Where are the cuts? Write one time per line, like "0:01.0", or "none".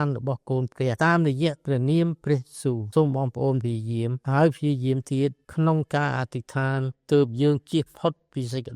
0:01.0
0:02.8
0:04.2
0:05.4